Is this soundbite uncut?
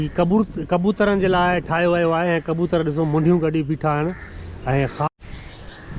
no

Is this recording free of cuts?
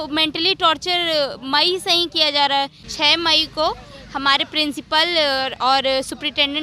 no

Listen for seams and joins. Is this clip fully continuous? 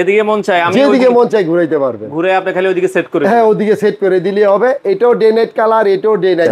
yes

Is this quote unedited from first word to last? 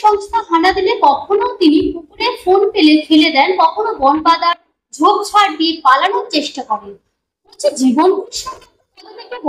yes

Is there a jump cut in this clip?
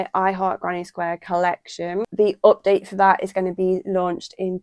yes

